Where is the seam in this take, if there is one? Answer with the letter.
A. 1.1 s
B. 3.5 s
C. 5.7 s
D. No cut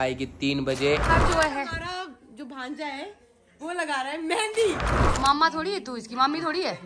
A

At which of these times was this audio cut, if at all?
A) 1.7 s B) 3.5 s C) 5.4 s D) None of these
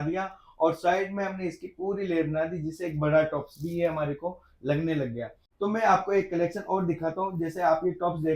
C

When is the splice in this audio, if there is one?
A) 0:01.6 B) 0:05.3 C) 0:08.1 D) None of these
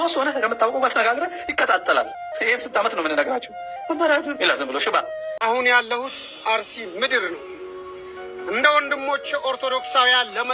B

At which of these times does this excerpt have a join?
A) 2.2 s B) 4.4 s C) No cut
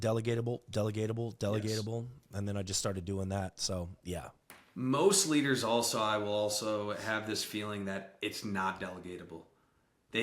B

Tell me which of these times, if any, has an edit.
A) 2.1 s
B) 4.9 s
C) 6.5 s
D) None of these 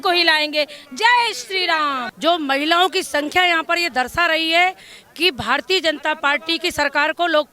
A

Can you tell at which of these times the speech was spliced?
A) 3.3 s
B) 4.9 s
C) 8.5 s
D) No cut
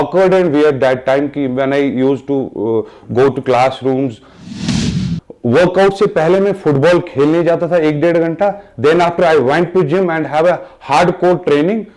B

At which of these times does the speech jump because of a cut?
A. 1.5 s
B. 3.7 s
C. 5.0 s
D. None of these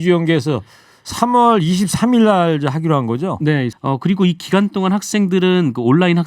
B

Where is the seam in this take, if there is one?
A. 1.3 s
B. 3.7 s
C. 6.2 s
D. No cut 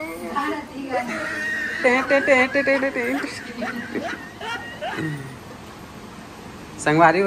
D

